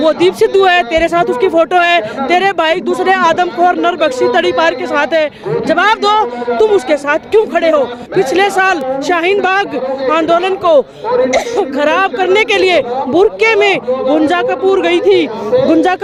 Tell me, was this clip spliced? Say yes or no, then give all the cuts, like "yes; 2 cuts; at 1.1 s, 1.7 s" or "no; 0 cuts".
no; 0 cuts